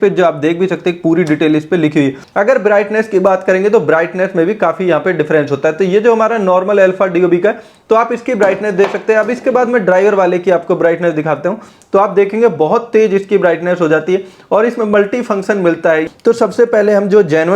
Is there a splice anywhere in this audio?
yes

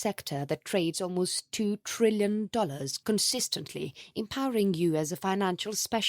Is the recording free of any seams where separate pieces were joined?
no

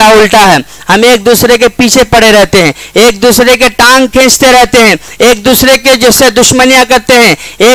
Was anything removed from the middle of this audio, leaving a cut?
no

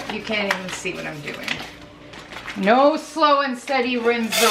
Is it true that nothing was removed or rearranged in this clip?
no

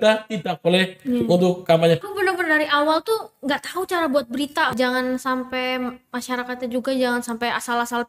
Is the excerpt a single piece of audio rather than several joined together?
no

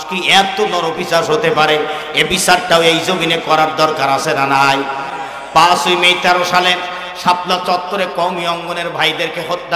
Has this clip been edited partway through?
no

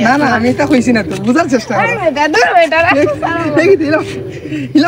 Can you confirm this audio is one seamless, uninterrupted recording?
yes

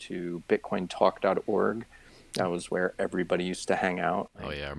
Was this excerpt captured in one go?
yes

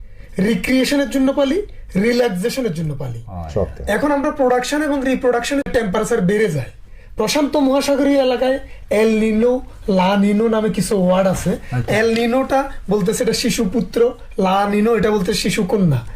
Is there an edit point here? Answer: yes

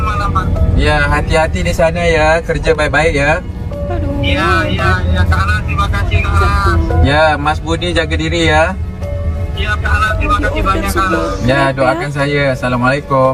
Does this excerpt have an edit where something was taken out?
no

